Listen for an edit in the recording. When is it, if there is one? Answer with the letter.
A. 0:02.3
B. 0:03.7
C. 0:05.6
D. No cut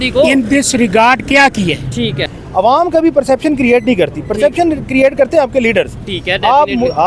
A